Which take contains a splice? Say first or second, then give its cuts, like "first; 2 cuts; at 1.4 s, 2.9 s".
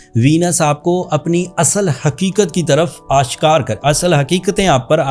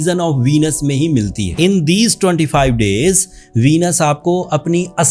second; 1 cut; at 1.5 s